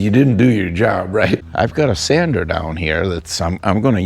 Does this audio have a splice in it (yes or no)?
yes